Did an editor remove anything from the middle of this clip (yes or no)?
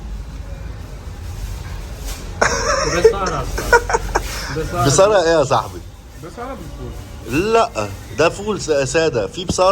no